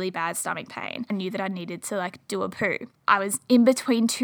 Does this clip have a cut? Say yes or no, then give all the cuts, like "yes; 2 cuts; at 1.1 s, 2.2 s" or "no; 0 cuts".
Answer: yes; 2 cuts; at 1.1 s, 2.9 s